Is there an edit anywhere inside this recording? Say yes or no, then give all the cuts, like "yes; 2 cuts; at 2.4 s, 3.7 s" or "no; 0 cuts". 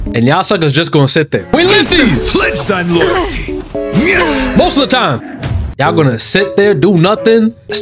no; 0 cuts